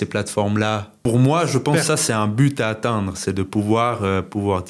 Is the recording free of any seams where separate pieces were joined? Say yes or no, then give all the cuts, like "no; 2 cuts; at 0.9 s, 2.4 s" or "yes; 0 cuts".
no; 1 cut; at 0.9 s